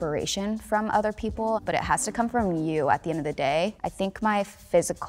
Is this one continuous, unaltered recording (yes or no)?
no